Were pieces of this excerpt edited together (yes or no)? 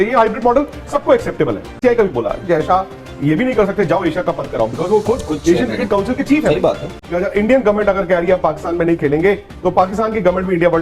yes